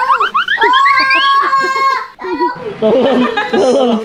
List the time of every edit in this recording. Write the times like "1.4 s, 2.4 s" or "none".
none